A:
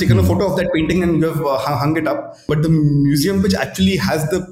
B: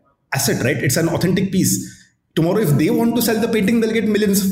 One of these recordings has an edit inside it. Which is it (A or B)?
A